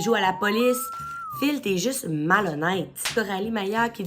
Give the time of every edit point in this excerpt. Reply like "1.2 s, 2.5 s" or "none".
3.1 s